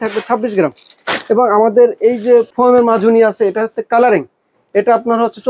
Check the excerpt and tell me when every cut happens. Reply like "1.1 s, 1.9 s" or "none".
none